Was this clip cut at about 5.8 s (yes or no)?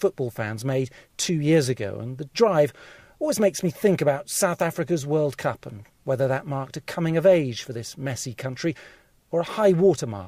no